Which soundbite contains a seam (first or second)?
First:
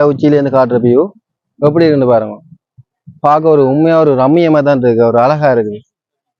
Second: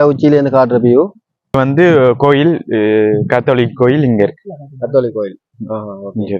second